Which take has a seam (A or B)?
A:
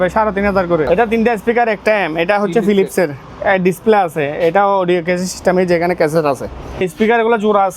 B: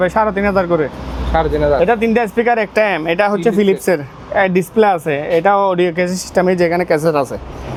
A